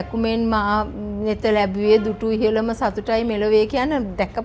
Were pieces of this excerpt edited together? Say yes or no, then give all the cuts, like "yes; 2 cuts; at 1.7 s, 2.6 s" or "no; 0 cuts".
no; 0 cuts